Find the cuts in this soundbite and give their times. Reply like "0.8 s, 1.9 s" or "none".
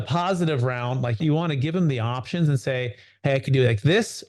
1.2 s